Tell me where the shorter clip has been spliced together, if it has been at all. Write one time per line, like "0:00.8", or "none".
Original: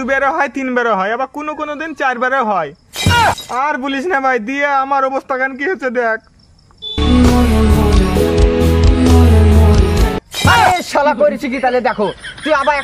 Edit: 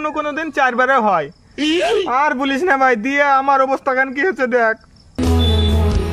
0:05.1